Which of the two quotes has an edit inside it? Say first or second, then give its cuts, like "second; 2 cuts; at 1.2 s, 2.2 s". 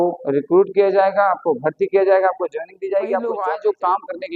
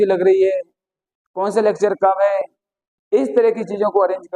first; 1 cut; at 3.3 s